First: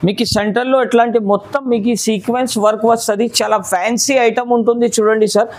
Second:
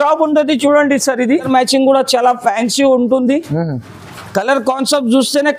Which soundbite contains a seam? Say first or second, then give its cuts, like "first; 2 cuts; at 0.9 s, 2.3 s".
second; 1 cut; at 1.5 s